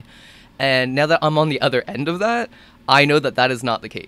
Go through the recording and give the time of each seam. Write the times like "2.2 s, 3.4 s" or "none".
none

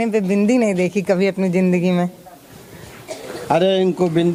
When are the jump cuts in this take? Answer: none

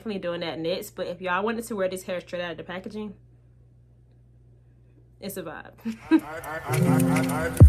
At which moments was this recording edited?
6.4 s

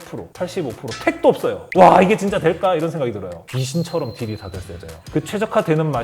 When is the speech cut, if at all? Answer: 3.3 s, 5.0 s

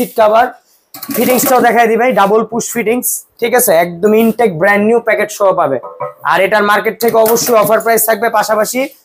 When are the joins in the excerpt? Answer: none

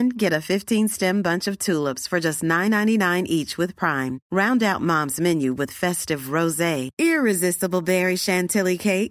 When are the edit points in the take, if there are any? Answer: none

